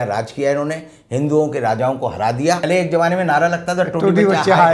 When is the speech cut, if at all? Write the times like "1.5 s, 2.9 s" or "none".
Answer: 2.7 s